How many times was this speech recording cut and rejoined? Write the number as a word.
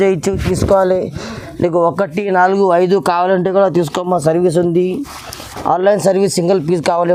zero